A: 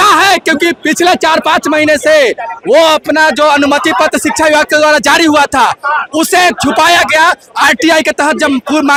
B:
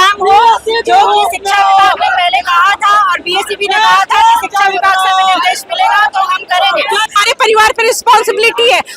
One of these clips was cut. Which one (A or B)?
B